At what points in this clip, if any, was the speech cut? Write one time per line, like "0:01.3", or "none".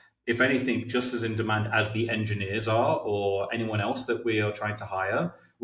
none